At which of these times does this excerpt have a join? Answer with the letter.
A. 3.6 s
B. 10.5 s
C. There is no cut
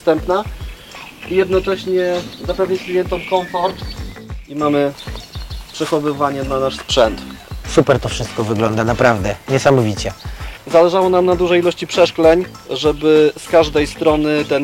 B